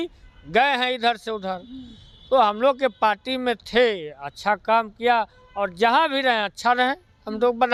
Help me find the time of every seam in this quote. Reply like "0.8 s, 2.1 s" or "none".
none